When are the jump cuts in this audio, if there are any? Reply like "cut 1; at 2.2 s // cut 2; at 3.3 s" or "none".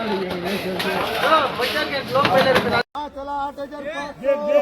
cut 1; at 3.0 s